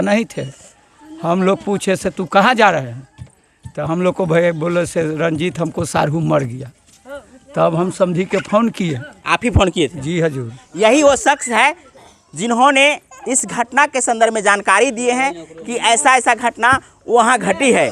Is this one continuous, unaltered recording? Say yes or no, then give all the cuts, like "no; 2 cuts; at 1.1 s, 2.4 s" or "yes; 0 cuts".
yes; 0 cuts